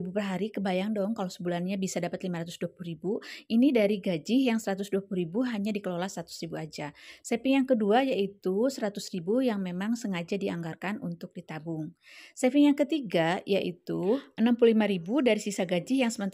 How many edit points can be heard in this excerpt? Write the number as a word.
one